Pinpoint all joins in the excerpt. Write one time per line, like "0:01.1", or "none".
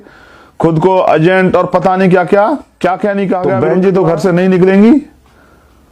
0:03.5